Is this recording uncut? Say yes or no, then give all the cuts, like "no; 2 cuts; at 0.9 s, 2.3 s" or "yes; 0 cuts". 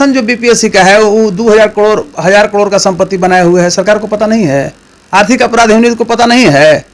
yes; 0 cuts